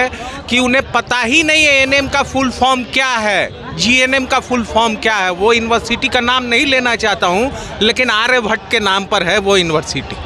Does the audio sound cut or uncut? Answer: uncut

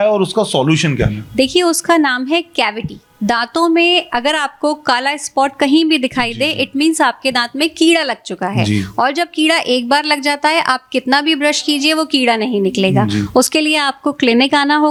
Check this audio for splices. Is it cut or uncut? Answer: uncut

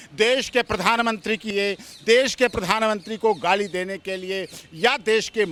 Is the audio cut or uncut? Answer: uncut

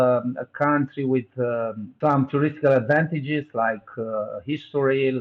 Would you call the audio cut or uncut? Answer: cut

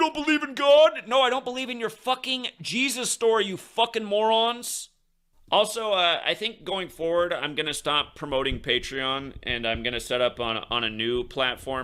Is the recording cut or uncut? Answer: cut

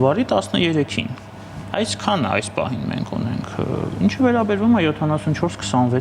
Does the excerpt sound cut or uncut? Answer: uncut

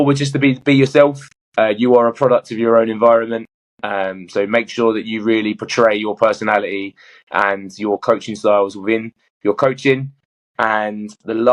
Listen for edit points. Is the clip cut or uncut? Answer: uncut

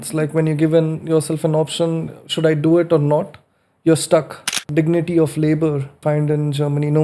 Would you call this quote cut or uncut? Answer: cut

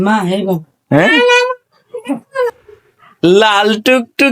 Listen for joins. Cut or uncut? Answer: cut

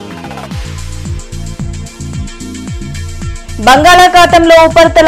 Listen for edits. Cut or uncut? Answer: uncut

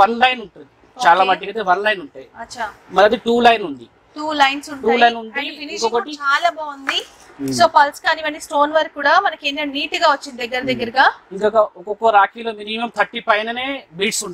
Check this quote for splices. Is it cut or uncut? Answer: uncut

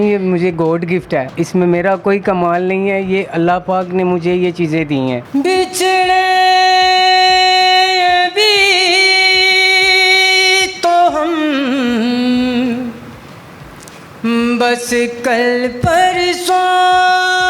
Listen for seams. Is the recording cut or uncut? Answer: cut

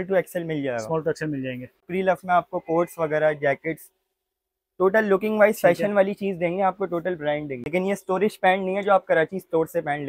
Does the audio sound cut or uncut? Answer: cut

